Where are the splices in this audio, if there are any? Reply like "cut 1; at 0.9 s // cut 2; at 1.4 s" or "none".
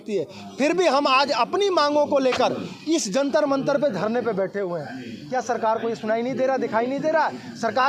none